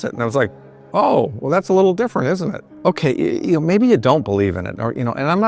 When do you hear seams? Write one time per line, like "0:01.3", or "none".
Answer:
0:00.8
0:02.7